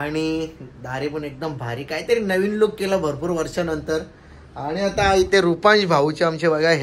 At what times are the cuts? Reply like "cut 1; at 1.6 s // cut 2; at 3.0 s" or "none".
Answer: none